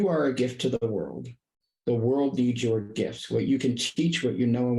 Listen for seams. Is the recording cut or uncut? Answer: uncut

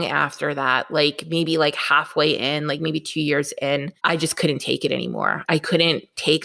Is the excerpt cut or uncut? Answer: cut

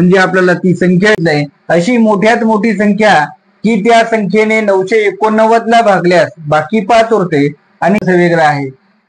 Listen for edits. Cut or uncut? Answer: cut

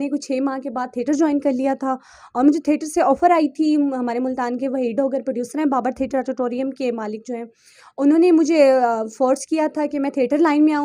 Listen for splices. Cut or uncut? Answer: uncut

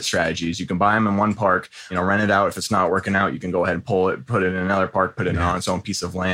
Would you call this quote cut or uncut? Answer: cut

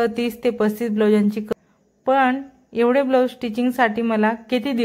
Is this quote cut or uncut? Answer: cut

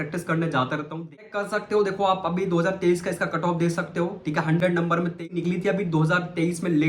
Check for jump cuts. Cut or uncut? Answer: cut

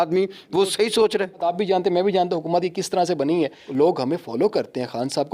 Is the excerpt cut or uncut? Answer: cut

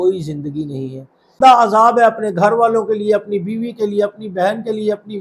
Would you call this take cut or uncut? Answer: cut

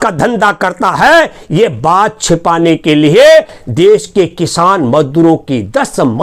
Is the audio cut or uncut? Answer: uncut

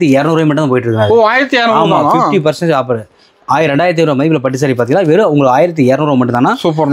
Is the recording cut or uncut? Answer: uncut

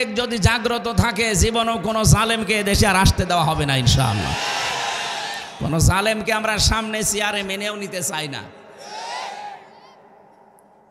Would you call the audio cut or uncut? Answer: uncut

